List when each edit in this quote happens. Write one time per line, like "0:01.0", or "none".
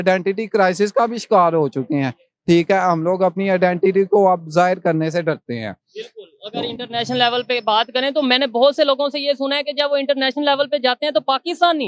none